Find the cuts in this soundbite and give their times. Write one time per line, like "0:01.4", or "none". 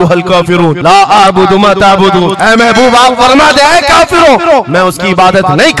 none